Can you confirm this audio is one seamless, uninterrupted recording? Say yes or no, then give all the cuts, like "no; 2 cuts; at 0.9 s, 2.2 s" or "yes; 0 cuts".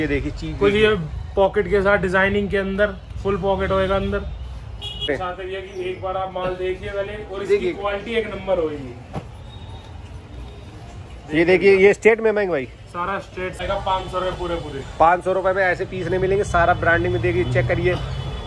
no; 2 cuts; at 5.1 s, 13.6 s